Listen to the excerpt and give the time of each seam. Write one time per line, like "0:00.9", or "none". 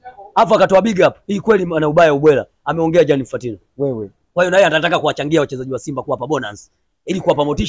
none